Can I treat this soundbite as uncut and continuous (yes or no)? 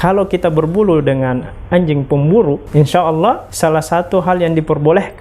no